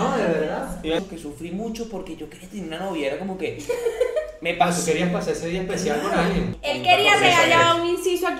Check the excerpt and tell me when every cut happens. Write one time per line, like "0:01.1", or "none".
0:01.0
0:06.6